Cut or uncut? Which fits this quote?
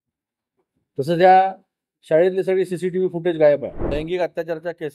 cut